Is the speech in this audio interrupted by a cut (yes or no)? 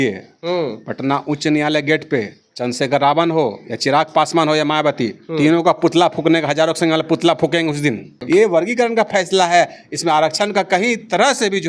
yes